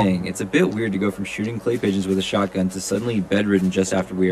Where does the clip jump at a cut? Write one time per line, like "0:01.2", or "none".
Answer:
none